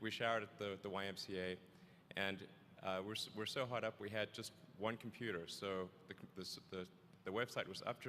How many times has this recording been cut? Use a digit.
1